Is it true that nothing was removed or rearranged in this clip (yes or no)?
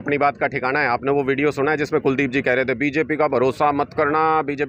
yes